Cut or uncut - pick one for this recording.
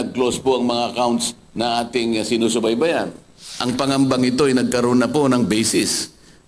cut